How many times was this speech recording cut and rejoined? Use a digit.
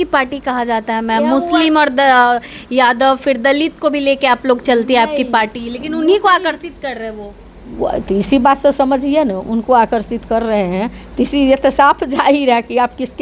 0